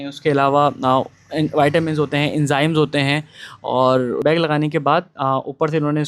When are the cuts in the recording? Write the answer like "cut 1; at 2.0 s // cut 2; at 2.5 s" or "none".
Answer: cut 1; at 4.2 s